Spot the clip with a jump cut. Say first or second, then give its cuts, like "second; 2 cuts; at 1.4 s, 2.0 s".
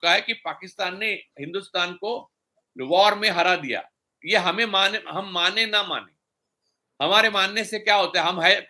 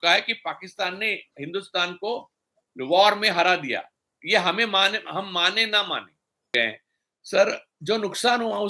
second; 1 cut; at 6.5 s